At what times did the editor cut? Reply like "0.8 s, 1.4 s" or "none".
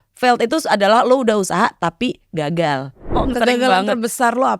3.2 s